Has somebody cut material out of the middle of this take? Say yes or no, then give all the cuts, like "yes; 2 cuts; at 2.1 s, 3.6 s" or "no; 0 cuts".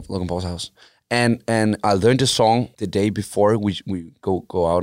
yes; 1 cut; at 2.7 s